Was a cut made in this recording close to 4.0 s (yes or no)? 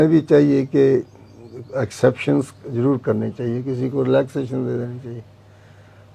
no